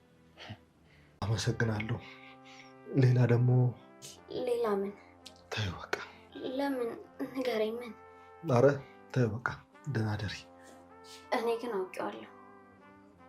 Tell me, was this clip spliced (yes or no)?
yes